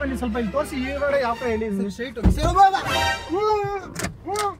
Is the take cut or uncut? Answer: uncut